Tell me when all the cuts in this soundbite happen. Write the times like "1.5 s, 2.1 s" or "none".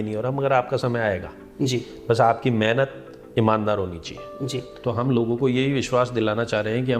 4.7 s